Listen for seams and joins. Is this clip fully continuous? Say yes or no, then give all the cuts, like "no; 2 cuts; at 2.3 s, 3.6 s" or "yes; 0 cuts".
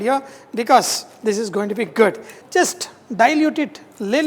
yes; 0 cuts